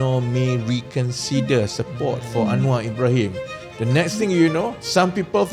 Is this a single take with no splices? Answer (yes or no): yes